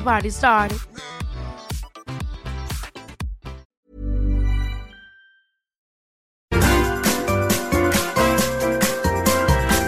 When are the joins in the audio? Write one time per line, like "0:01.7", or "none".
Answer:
0:03.7
0:06.0

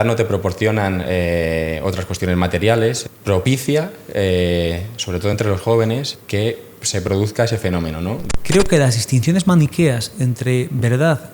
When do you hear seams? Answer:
0:03.0
0:06.1
0:08.2

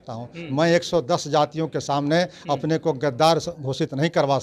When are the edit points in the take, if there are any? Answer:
none

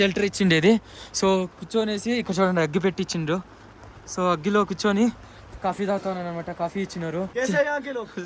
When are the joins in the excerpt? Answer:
0:07.4

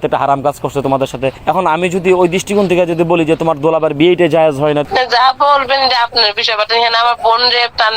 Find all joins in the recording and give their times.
0:01.4
0:04.9

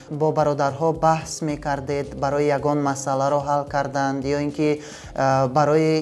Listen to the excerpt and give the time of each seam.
none

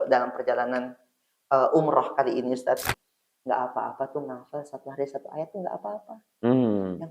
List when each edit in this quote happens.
0:02.8

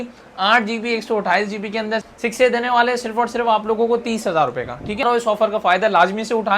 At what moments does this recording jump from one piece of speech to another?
0:02.1
0:05.0

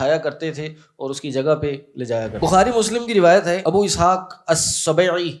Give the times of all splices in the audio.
0:02.3
0:03.6

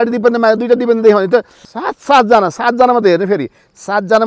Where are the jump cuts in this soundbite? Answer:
0:01.6

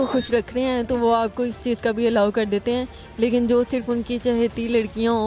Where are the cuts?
none

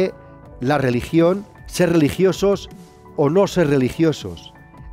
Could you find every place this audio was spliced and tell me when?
0:01.6

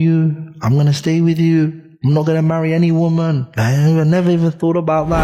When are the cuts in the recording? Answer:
none

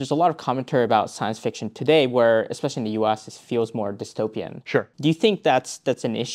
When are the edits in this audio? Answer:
0:04.9

